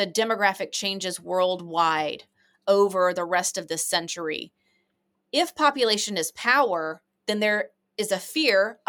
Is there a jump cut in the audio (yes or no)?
no